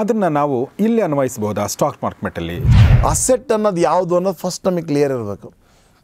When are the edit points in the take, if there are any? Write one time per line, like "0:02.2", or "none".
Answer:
0:02.7